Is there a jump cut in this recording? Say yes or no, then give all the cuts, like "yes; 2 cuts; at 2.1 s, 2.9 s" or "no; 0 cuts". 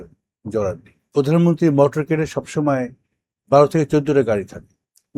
yes; 1 cut; at 1.0 s